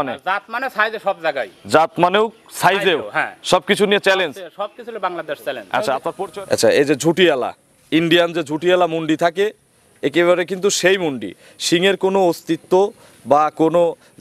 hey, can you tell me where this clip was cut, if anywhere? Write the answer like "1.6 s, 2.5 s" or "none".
6.2 s